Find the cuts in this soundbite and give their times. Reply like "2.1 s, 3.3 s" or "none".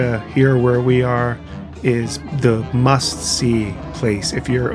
2.2 s